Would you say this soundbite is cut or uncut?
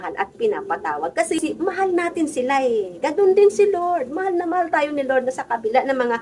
cut